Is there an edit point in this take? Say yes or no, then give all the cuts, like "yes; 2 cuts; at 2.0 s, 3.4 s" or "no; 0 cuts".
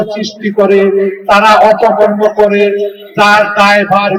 no; 0 cuts